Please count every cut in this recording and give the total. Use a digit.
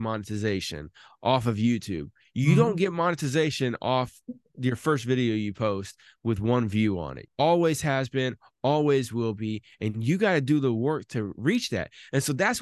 1